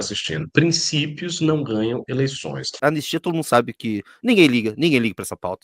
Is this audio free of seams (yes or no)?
no